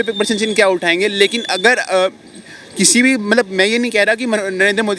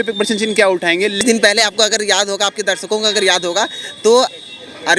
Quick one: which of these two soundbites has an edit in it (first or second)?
second